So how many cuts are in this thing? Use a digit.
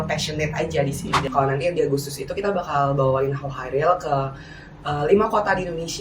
1